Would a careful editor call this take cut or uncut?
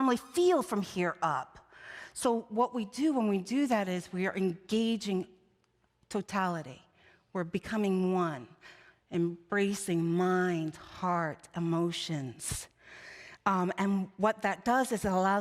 uncut